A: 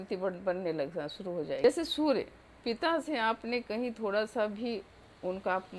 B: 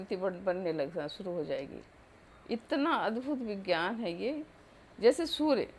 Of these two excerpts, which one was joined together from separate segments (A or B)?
A